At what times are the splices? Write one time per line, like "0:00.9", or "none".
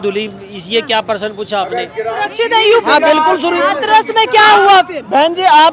0:02.3